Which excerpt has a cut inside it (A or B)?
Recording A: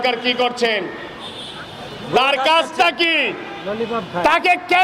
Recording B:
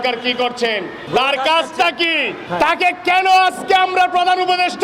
B